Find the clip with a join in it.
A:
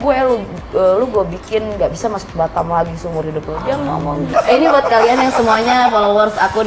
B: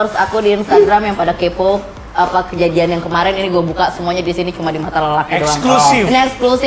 A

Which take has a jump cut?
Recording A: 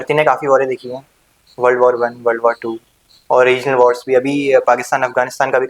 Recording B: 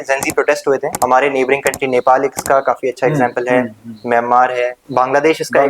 B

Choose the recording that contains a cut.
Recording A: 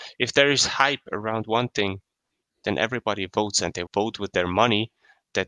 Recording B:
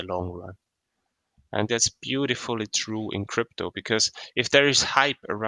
B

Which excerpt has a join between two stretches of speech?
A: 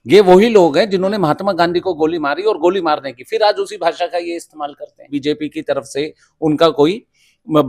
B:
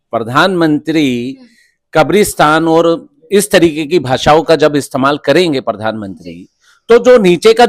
A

